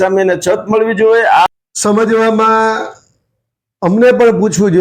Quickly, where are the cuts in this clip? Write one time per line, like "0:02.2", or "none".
0:01.5